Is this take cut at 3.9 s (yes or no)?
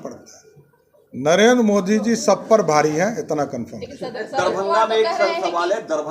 no